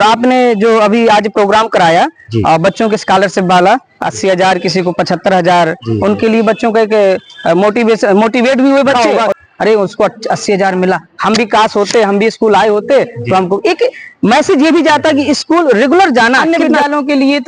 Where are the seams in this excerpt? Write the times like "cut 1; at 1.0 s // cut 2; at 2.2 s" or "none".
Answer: cut 1; at 8.9 s // cut 2; at 16.4 s